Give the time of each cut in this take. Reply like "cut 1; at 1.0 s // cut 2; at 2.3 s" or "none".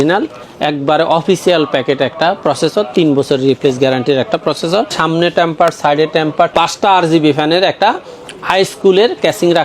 cut 1; at 4.9 s